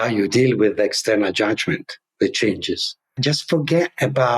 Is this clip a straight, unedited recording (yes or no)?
no